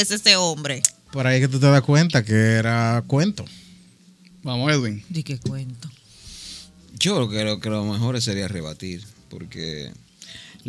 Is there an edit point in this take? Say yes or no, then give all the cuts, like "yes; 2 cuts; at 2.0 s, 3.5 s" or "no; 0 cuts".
no; 0 cuts